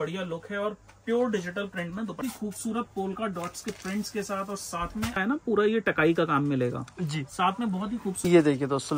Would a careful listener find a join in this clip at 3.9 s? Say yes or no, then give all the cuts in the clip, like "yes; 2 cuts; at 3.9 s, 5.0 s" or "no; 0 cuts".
no; 3 cuts; at 2.2 s, 5.2 s, 8.2 s